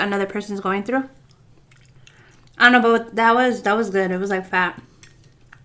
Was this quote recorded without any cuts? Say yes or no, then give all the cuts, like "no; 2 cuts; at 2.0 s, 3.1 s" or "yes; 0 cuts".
yes; 0 cuts